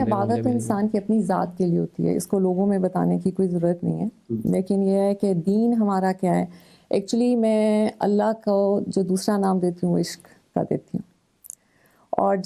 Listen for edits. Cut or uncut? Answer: cut